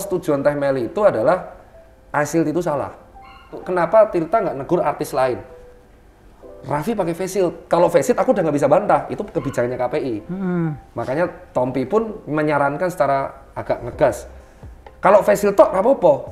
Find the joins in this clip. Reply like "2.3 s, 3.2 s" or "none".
3.6 s